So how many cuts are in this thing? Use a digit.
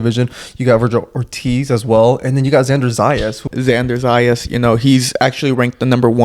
1